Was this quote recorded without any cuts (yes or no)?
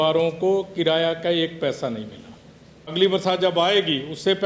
no